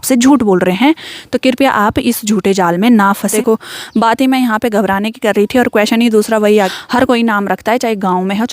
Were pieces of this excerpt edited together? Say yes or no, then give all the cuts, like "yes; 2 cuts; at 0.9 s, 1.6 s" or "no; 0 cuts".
yes; 2 cuts; at 3.3 s, 6.7 s